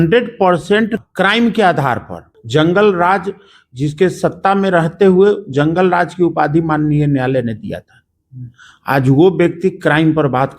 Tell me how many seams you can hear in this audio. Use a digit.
2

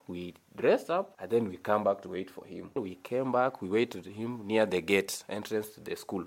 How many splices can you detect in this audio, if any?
2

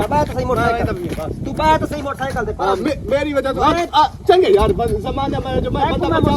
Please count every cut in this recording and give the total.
0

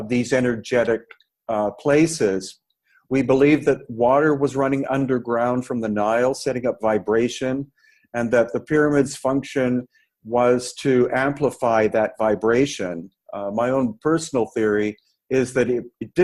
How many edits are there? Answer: 0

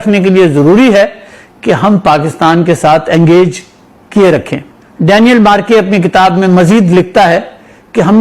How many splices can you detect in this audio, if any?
1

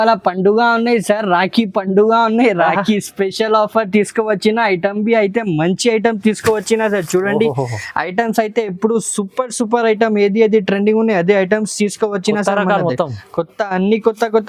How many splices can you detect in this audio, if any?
0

